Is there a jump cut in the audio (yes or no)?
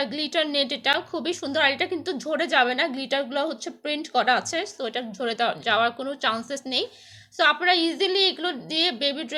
no